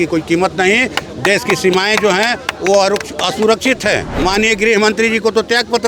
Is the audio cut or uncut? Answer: cut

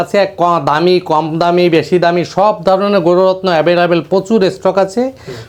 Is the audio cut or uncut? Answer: uncut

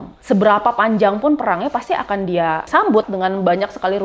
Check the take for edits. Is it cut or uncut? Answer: cut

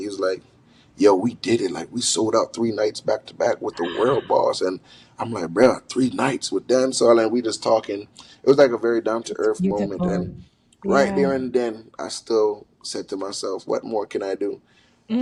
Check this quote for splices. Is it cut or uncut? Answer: uncut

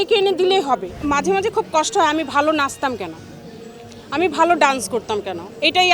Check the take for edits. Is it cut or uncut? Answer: cut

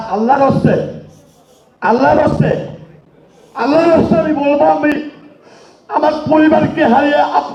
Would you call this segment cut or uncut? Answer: uncut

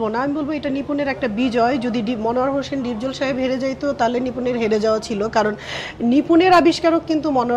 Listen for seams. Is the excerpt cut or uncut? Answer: uncut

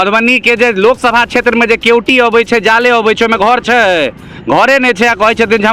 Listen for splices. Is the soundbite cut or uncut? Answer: uncut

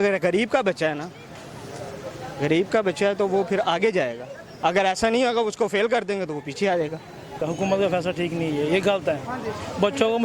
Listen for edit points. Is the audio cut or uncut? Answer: cut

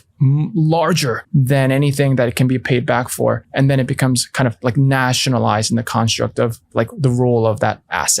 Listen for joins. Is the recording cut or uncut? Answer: cut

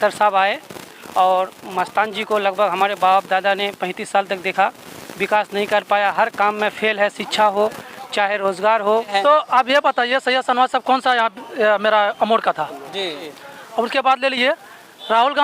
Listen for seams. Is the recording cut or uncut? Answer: cut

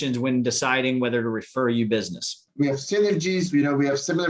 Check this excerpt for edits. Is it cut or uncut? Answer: cut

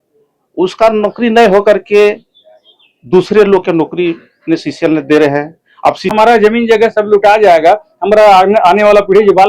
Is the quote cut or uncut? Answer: cut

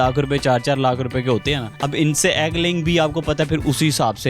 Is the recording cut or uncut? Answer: cut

